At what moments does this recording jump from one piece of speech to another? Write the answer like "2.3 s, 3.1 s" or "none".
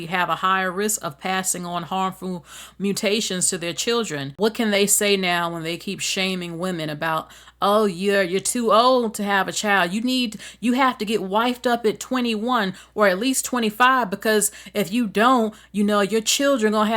4.3 s